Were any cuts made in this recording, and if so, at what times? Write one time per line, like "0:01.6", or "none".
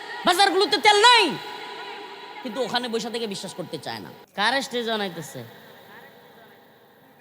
0:04.2